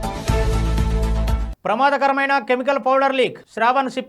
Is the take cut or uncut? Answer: cut